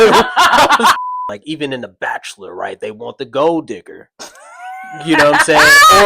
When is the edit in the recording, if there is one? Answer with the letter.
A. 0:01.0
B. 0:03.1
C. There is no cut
A